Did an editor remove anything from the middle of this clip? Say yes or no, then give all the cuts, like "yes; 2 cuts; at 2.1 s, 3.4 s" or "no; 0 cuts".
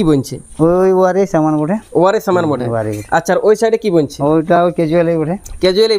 no; 0 cuts